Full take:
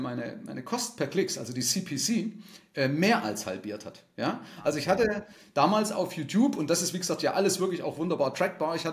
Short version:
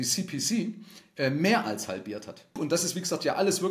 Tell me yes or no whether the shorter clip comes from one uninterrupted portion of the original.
no